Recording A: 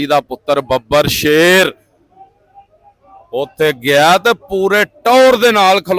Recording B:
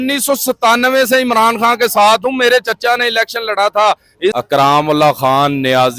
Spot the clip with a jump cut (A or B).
B